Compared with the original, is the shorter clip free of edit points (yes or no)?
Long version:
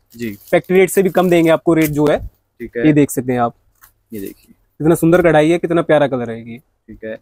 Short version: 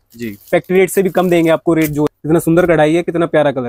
no